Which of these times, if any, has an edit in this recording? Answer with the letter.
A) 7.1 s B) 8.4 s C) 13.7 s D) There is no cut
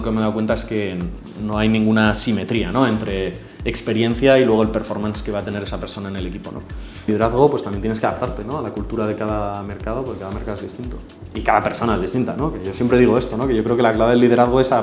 A